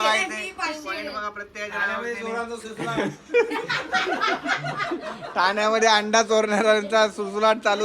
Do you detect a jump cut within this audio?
no; 0 cuts

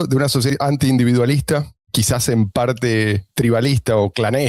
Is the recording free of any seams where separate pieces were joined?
no; 2 cuts; at 1.9 s, 3.3 s

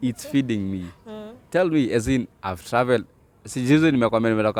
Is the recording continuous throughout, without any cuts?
yes; 0 cuts

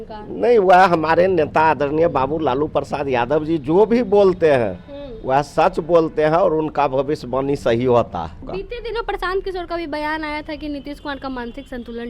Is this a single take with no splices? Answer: no; 1 cut; at 8.4 s

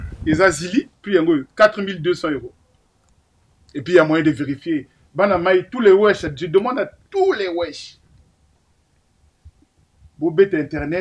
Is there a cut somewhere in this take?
yes; 1 cut; at 1.0 s

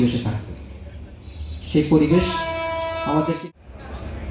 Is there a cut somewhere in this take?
yes; 1 cut; at 3.4 s

